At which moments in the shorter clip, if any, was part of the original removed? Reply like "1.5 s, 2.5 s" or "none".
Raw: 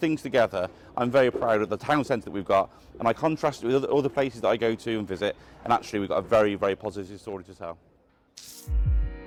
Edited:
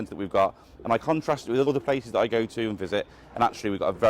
1.7 s